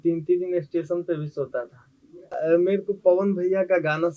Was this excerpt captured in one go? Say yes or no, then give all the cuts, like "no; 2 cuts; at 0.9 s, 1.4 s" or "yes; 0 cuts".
no; 1 cut; at 2.4 s